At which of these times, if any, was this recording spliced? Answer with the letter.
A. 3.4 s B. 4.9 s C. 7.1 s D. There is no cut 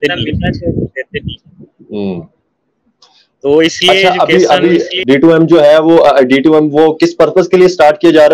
B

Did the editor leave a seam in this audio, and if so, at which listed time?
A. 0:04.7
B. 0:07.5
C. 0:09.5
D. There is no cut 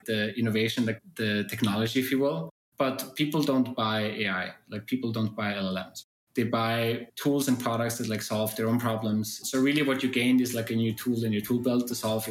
C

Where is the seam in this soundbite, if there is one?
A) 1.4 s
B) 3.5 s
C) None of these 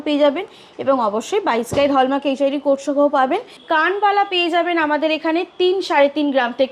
B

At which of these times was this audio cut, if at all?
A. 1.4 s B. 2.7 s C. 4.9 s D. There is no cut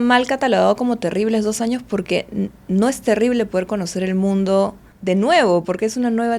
C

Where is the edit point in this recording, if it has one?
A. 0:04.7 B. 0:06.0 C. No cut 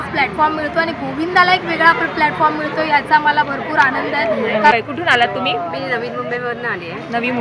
A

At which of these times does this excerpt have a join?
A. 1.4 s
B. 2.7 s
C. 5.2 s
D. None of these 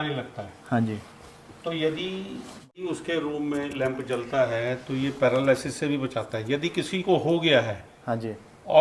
B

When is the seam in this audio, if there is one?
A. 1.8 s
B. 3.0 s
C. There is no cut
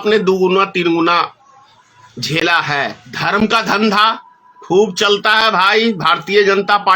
B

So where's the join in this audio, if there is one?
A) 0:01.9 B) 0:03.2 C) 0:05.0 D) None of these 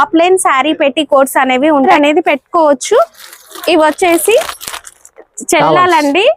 A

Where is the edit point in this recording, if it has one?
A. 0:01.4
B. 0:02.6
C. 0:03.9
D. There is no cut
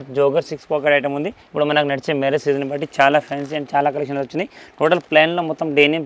A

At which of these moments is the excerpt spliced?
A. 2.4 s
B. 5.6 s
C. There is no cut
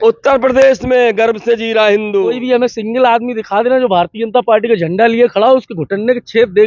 A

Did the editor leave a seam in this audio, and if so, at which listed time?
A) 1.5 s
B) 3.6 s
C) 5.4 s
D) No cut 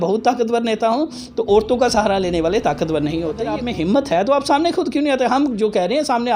B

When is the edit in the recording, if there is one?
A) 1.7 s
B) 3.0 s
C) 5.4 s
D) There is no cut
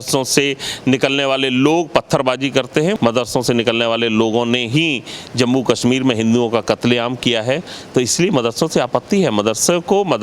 B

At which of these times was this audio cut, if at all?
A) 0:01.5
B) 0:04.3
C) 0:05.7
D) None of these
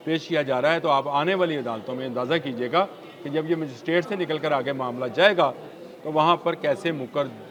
D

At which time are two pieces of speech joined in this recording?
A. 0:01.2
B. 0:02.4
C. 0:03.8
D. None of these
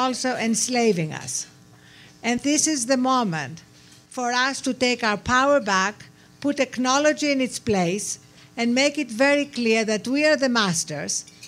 B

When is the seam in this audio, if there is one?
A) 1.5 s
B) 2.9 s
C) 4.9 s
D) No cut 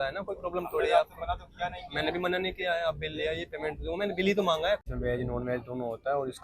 C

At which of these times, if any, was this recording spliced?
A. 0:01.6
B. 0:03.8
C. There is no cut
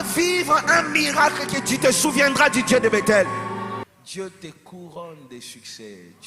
B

